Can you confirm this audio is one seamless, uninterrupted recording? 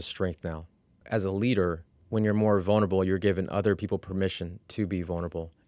no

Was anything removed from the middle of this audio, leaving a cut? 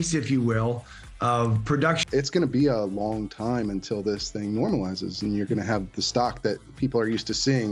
yes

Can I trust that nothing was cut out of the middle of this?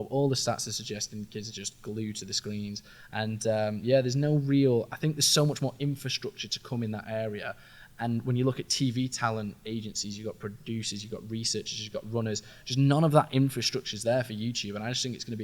yes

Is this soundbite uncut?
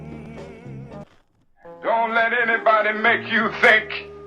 no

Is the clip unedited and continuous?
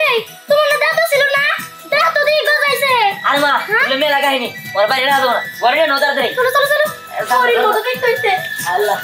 yes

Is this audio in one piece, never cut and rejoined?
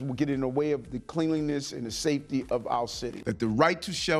no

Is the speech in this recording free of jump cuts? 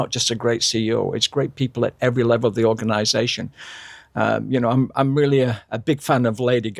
yes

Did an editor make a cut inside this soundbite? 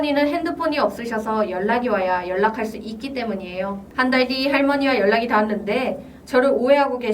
yes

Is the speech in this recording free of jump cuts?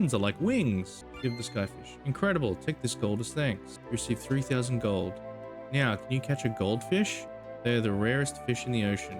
no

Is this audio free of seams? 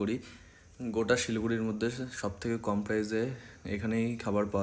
yes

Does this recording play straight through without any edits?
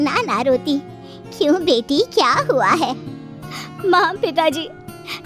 yes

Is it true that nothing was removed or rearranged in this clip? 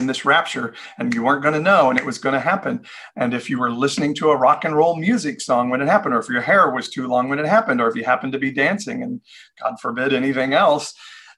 yes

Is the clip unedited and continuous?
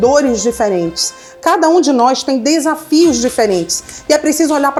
yes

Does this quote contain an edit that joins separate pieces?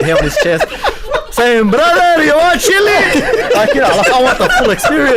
no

